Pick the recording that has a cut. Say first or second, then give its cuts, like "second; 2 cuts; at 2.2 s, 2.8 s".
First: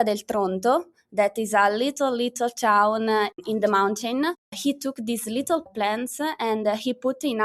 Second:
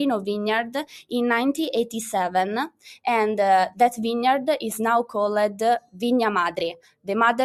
first; 3 cuts; at 3.3 s, 4.5 s, 5.7 s